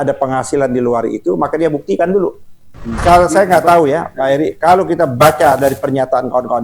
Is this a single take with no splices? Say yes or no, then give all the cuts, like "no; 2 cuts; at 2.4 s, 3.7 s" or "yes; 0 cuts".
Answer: no; 1 cut; at 2.9 s